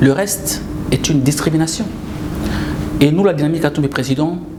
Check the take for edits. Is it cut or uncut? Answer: uncut